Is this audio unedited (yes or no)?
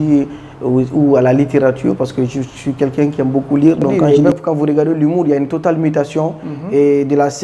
no